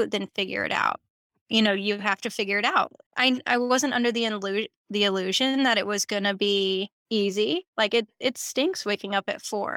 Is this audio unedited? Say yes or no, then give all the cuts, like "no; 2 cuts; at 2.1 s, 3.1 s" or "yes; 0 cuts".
no; 1 cut; at 3.0 s